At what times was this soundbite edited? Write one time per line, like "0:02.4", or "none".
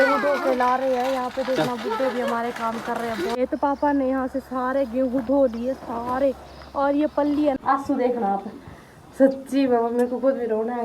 0:03.4
0:07.6